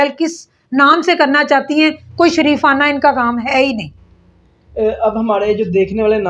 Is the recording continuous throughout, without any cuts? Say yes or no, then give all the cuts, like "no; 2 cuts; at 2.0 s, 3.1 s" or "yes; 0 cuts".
yes; 0 cuts